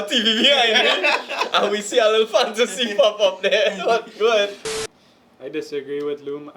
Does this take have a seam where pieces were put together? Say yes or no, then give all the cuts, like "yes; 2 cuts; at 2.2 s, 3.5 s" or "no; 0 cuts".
yes; 1 cut; at 4.7 s